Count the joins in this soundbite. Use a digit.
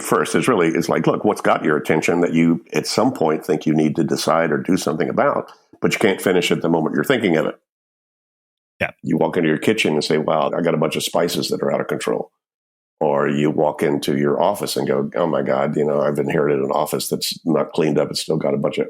2